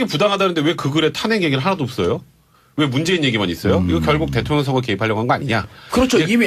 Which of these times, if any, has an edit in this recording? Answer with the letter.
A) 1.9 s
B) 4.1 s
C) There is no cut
A